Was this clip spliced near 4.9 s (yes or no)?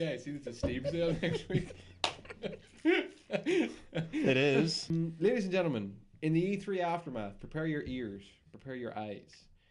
yes